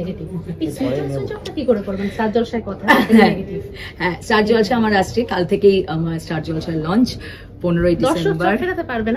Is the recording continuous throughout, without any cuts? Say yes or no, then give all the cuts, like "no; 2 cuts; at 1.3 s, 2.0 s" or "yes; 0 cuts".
yes; 0 cuts